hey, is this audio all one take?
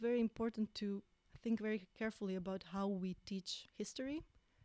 no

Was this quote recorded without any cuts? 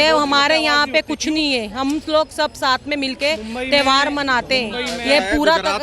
yes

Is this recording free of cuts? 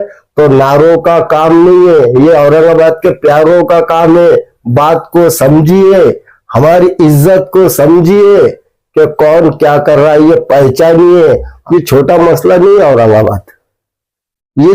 no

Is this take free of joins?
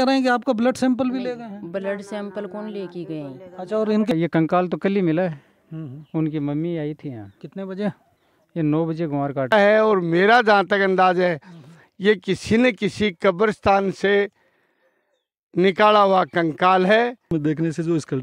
no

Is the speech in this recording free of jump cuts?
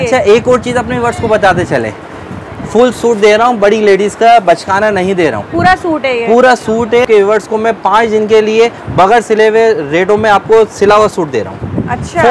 no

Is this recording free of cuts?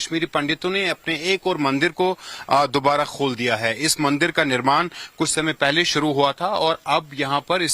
no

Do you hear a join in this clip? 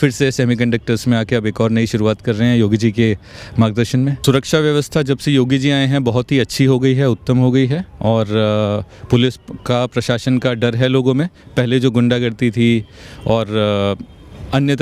yes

